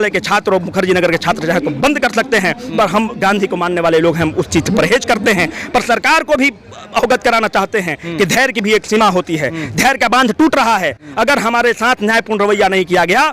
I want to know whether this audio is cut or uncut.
uncut